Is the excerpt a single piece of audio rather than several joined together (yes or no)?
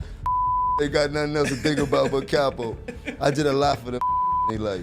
yes